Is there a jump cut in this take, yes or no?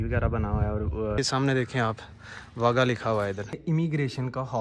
yes